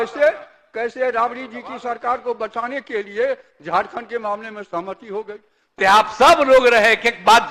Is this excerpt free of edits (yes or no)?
no